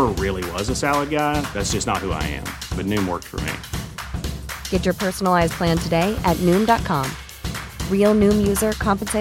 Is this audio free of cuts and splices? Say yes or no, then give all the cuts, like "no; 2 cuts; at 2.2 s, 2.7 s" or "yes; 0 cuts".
yes; 0 cuts